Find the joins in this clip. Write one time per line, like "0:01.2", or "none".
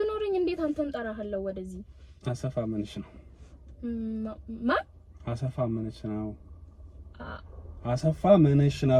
none